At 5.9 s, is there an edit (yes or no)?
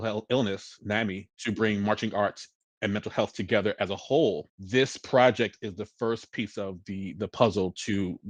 no